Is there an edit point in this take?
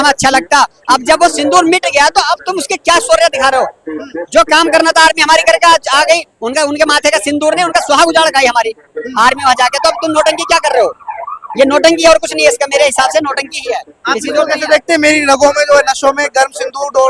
no; 0 cuts

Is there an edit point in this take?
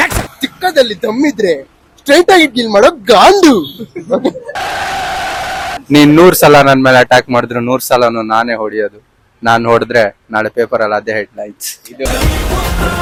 no; 0 cuts

